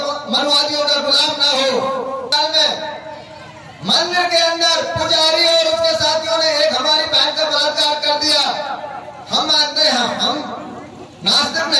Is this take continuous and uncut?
no; 1 cut; at 2.3 s

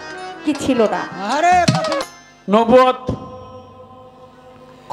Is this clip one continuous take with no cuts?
no; 1 cut; at 2.0 s

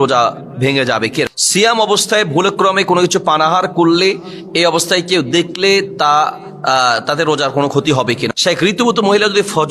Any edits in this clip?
yes; 2 cuts; at 1.3 s, 8.3 s

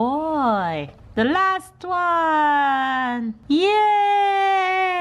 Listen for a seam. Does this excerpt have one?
yes; 2 cuts; at 1.0 s, 3.3 s

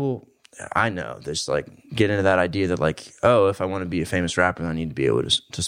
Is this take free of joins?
yes; 0 cuts

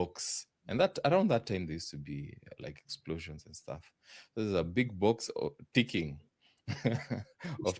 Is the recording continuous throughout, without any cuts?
yes; 0 cuts

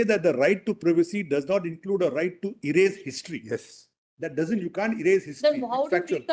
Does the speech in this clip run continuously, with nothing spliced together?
yes; 0 cuts

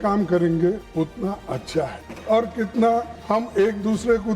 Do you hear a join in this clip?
yes; 3 cuts; at 0.8 s, 2.1 s, 3.1 s

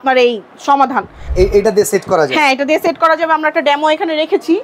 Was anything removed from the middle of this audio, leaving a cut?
yes; 1 cut; at 1.3 s

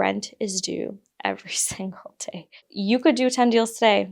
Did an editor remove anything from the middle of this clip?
yes; 1 cut; at 2.7 s

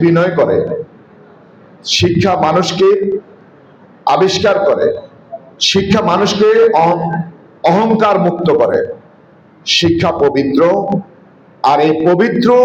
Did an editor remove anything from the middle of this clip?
no; 0 cuts

